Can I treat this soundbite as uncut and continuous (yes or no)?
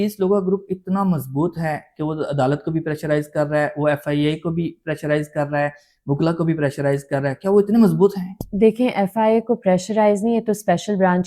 yes